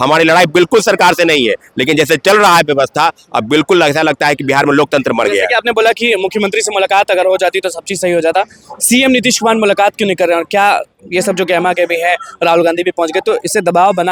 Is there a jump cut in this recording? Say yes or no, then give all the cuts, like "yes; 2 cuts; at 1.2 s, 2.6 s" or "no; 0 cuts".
no; 0 cuts